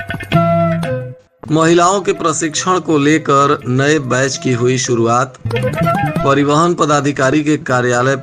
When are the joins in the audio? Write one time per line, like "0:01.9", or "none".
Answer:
0:01.3